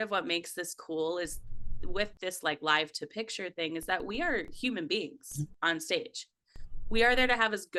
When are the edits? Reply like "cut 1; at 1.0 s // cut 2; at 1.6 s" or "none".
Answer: none